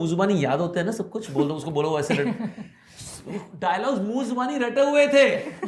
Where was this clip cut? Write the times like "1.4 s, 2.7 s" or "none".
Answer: none